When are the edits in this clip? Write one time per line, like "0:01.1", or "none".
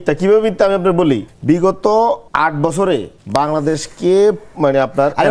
0:01.3
0:02.3
0:03.2